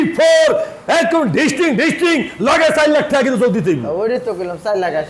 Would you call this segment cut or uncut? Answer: uncut